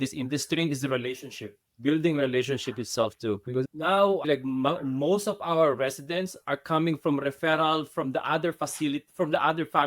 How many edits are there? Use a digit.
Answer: 1